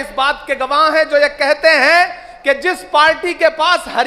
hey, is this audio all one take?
yes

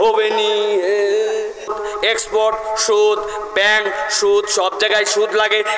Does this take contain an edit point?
yes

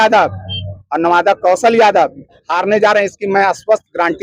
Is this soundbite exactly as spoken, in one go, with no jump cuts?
yes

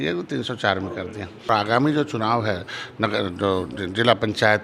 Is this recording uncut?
no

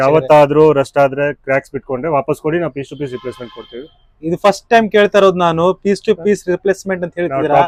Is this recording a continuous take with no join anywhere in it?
yes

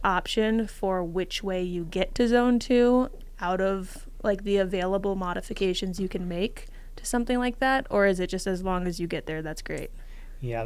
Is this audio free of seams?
yes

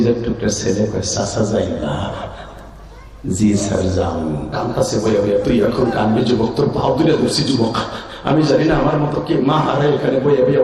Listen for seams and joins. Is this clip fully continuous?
no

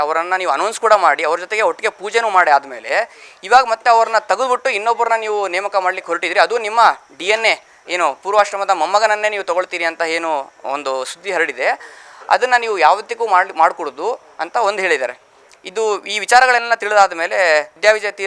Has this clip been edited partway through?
no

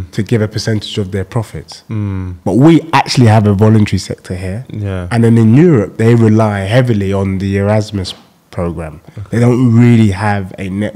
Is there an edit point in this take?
no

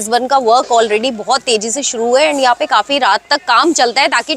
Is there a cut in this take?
no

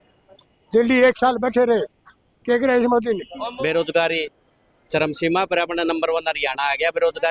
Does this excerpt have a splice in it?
yes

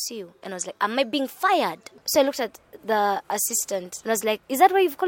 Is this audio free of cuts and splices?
no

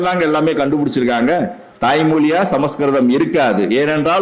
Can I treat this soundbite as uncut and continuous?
no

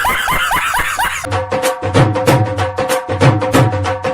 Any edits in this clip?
yes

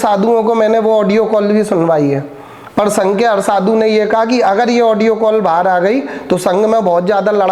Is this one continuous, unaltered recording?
yes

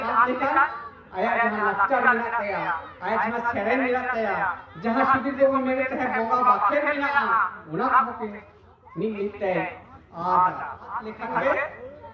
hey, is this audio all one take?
no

